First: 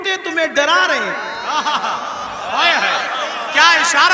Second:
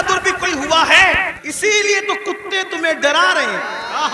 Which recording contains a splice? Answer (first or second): second